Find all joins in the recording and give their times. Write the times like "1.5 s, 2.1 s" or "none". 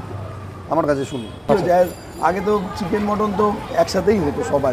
1.3 s